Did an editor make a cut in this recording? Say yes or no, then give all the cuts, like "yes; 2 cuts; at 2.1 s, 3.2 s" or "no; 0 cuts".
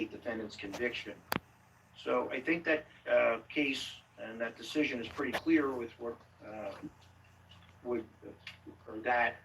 no; 0 cuts